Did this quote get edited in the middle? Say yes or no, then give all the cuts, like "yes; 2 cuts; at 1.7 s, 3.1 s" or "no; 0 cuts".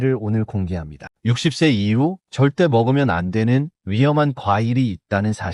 yes; 1 cut; at 1.1 s